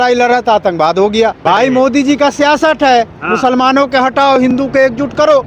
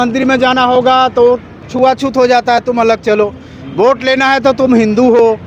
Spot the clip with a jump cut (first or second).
first